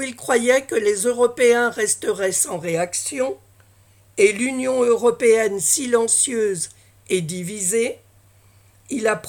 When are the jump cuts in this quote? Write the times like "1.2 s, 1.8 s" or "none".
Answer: none